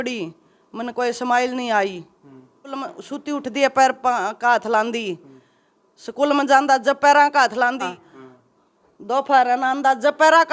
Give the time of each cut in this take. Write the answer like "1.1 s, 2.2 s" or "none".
2.7 s, 7.9 s